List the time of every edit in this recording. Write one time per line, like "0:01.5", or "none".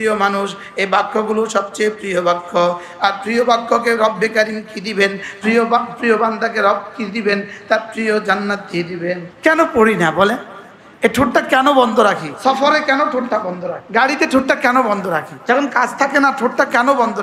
0:09.3
0:12.3
0:13.8
0:15.3

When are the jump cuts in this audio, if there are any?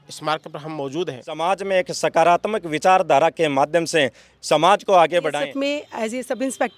0:01.4
0:05.3

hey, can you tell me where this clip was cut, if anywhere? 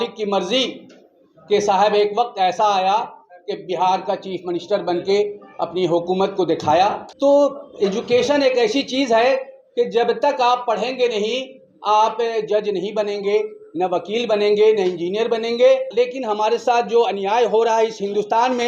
0:07.1
0:15.9

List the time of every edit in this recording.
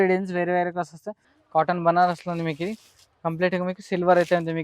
0:01.3

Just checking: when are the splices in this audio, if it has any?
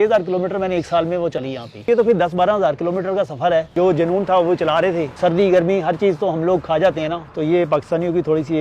0:01.9
0:03.7
0:05.1
0:07.2

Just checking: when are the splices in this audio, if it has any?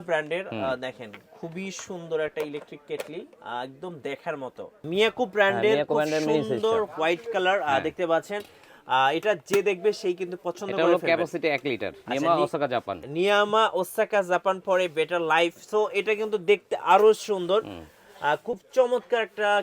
0:04.8
0:11.9

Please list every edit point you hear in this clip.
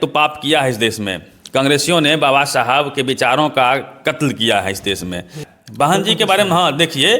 0:05.4

